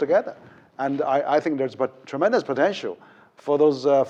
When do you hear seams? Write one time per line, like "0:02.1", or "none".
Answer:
none